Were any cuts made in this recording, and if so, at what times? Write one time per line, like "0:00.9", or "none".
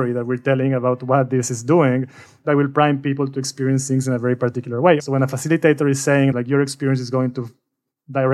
0:05.0